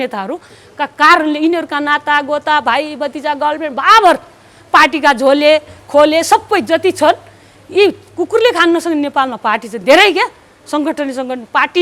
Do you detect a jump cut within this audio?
no; 0 cuts

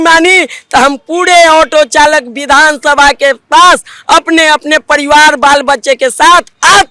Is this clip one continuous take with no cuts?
yes; 0 cuts

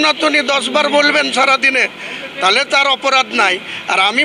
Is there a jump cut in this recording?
no; 0 cuts

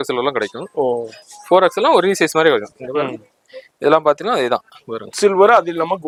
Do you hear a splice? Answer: no; 0 cuts

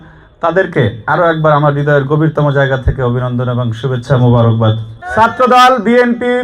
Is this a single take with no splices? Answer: no; 1 cut; at 5.0 s

